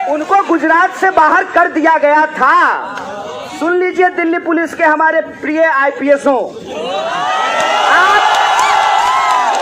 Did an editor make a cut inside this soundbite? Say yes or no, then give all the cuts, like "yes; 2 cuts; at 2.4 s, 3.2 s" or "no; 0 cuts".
no; 0 cuts